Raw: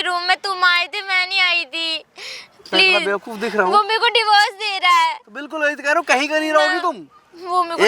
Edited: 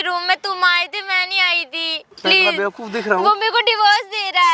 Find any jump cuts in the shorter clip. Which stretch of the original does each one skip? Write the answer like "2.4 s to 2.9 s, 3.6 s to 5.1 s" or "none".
2.0 s to 2.5 s